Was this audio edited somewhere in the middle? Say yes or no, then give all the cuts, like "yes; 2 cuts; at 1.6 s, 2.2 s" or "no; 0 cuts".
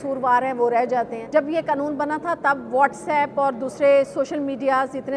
yes; 1 cut; at 1.2 s